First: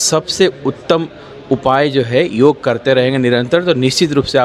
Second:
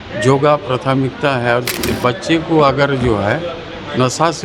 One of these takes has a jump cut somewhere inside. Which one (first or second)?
second